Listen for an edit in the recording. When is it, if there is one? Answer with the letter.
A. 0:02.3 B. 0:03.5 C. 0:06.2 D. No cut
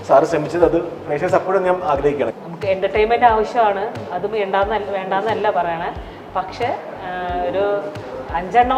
A